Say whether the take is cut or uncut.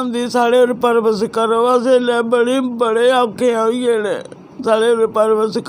uncut